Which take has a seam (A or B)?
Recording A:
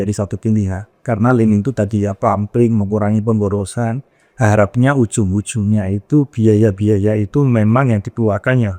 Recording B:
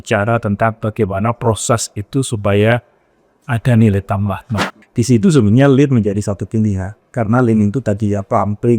B